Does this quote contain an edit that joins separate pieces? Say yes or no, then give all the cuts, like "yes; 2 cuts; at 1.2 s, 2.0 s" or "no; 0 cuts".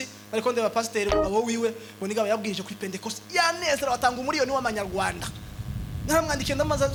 no; 0 cuts